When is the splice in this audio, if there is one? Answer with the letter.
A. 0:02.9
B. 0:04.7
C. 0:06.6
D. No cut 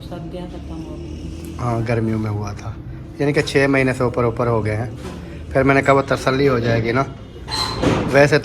D